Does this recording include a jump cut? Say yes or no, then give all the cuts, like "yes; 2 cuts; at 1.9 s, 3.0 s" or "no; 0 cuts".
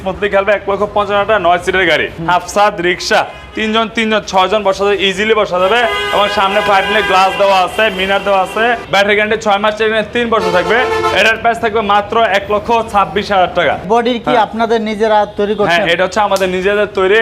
yes; 3 cuts; at 2.1 s, 8.8 s, 13.8 s